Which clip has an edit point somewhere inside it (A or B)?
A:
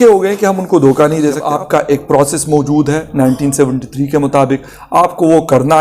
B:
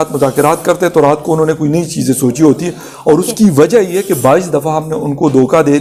A